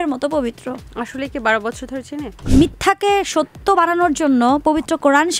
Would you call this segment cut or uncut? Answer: cut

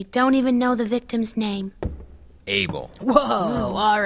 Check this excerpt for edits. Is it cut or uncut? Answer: uncut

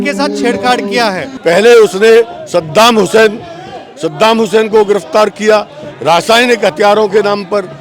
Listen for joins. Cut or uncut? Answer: cut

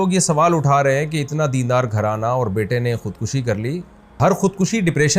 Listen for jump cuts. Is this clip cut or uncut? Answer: cut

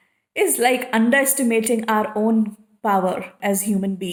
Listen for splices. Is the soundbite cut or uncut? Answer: uncut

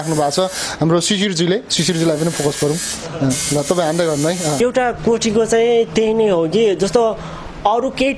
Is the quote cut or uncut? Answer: cut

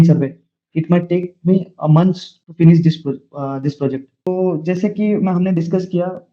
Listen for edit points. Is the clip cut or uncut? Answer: cut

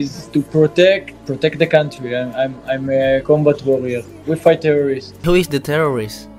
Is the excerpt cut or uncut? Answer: uncut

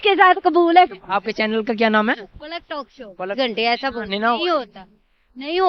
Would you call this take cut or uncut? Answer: cut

